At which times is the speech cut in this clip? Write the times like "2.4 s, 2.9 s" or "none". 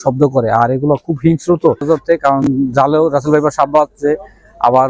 1.8 s